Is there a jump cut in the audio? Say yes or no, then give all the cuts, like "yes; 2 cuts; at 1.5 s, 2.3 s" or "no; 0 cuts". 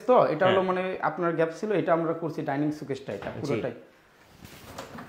no; 0 cuts